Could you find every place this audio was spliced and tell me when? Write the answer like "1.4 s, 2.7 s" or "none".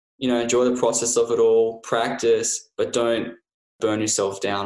3.7 s